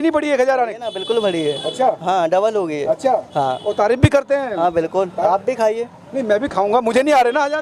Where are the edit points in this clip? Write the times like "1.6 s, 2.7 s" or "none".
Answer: none

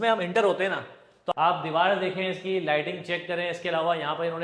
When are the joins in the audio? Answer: 1.1 s

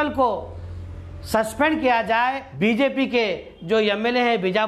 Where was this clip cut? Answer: 2.4 s

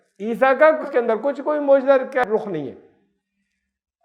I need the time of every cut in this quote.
2.2 s

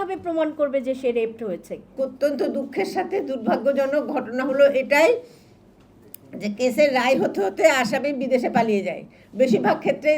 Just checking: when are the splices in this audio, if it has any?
1.9 s

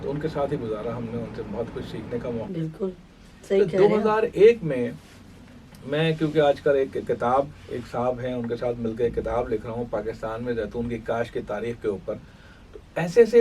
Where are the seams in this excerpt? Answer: 2.5 s

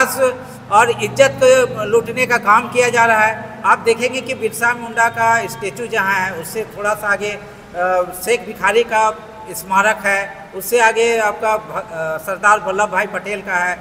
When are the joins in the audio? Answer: none

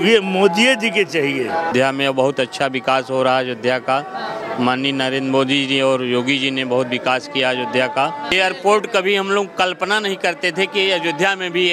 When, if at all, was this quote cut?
1.7 s, 8.3 s

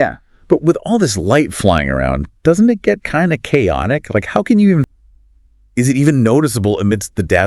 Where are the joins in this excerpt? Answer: 4.9 s

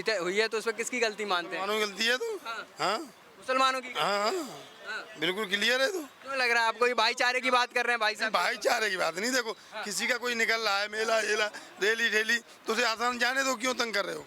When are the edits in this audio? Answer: none

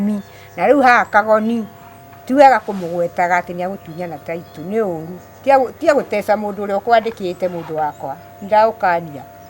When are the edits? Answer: none

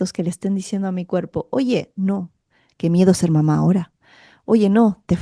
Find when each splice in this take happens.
none

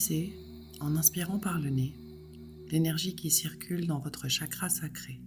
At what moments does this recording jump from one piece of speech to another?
none

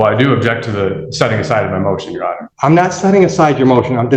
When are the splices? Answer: 2.5 s

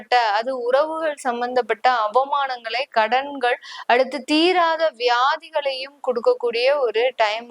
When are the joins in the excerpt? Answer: none

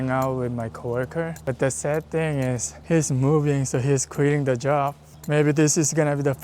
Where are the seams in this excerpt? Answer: 1.4 s, 2.7 s, 5.1 s

